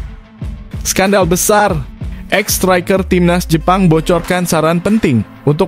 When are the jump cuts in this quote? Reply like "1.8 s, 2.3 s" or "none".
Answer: 0.9 s

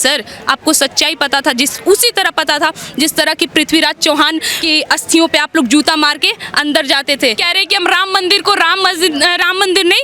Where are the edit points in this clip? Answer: 4.5 s, 7.5 s

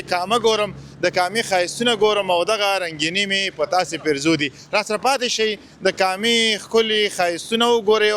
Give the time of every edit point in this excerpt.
none

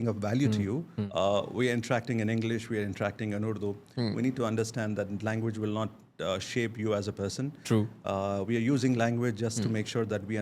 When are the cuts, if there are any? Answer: 1.0 s

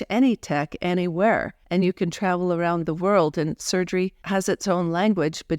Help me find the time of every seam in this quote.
1.6 s, 4.2 s

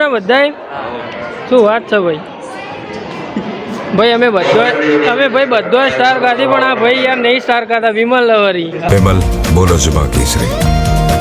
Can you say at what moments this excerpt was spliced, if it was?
8.9 s

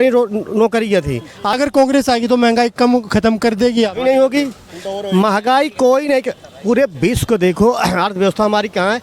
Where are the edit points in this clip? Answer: 1.5 s

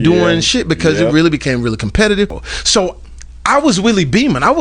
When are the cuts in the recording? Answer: 2.4 s

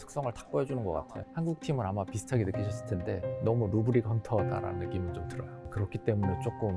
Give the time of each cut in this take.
1.2 s, 5.7 s

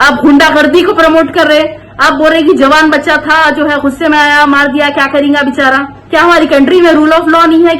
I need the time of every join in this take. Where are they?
5.9 s

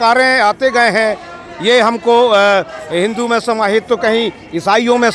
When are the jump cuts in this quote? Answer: none

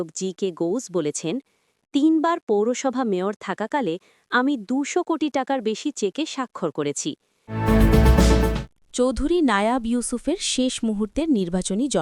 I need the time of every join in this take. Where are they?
7.4 s, 8.7 s

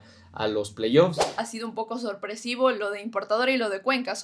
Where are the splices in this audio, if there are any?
1.4 s

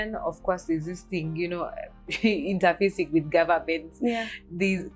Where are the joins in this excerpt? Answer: none

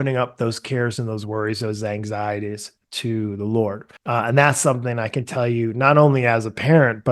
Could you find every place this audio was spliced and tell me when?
3.9 s

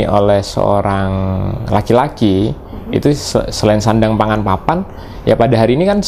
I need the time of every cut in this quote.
none

